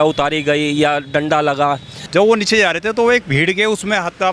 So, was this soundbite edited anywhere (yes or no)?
yes